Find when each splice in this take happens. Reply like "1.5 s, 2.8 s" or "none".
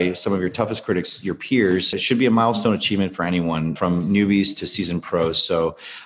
2.0 s, 3.8 s